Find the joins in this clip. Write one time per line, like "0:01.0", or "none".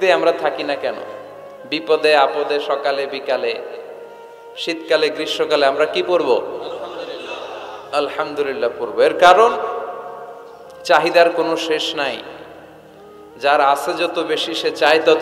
none